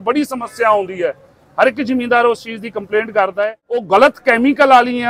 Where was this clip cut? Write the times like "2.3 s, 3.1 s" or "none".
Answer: 3.8 s